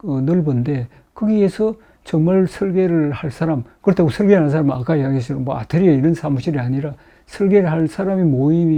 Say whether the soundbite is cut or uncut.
uncut